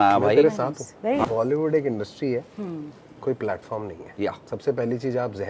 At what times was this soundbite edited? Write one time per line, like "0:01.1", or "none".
0:01.2